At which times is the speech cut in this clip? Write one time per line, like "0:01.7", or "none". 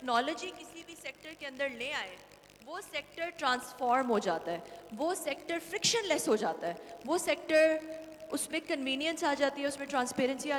none